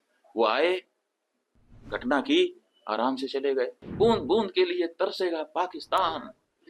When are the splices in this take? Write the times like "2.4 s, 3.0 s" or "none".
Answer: 3.8 s